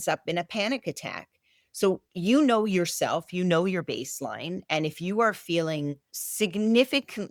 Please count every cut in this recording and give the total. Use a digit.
0